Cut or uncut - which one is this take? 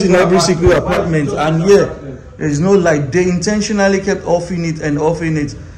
uncut